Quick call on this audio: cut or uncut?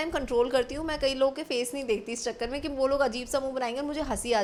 uncut